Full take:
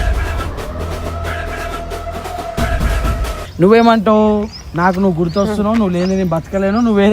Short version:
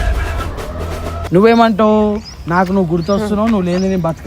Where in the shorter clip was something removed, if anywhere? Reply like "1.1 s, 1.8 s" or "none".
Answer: 1.2 s